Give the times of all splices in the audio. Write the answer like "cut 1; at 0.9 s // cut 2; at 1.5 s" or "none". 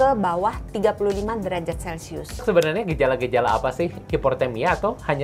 cut 1; at 2.4 s // cut 2; at 4.0 s